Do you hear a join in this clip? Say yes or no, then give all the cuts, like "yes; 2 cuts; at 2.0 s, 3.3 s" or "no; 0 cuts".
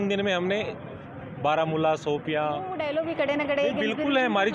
yes; 1 cut; at 2.8 s